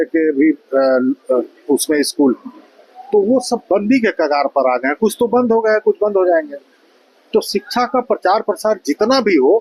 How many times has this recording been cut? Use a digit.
0